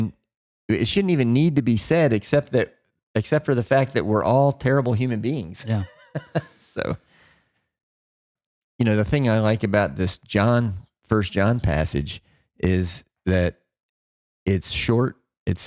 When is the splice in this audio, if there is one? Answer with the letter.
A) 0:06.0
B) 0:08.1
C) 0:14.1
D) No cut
B